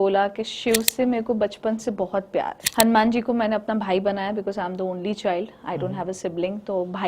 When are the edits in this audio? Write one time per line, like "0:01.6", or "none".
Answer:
0:02.6